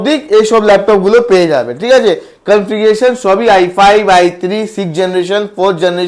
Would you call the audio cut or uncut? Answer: uncut